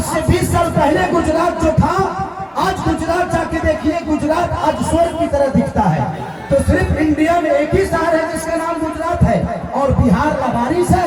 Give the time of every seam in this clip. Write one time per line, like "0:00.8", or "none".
none